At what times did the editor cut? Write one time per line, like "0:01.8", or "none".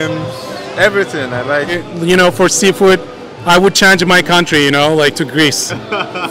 none